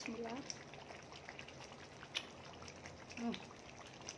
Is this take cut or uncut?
uncut